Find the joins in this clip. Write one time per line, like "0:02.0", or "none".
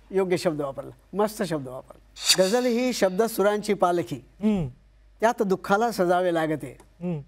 0:02.2

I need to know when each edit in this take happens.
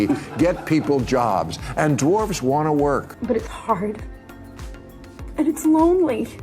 0:03.1

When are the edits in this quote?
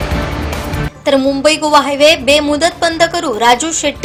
none

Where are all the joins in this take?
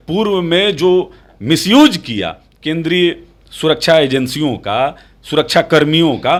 none

